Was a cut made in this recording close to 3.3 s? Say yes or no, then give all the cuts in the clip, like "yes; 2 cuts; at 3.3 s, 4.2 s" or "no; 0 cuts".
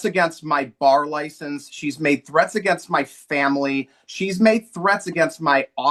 no; 0 cuts